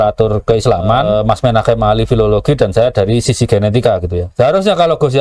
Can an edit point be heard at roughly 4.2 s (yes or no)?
yes